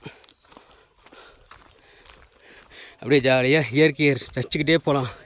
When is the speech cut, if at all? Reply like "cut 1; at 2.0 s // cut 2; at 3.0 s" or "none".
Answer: none